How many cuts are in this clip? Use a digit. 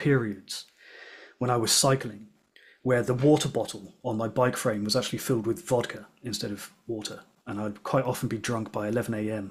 0